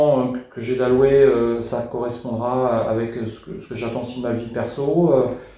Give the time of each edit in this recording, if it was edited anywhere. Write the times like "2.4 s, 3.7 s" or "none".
none